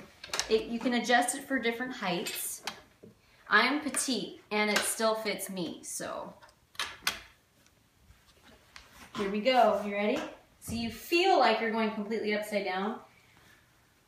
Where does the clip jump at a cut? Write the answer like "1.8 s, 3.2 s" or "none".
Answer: 4.0 s

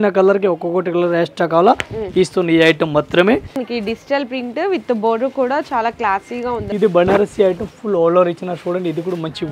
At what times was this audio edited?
3.7 s, 6.6 s

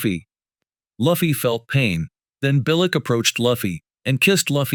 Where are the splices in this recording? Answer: none

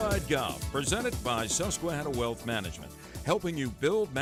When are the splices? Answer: none

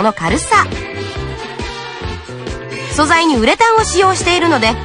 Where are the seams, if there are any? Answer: 1.1 s, 2.9 s

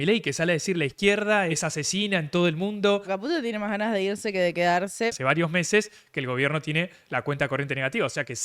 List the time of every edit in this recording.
1.5 s, 3.1 s, 5.1 s

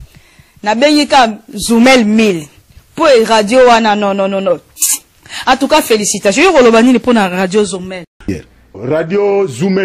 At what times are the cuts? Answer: 8.3 s

